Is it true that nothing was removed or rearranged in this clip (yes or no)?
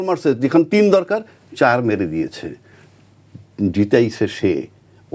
yes